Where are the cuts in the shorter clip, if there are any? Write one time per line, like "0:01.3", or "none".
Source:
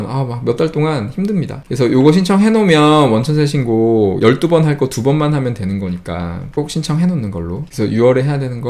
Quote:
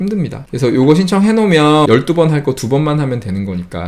0:01.9